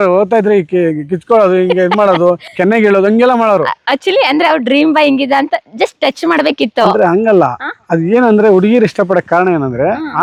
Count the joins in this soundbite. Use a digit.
0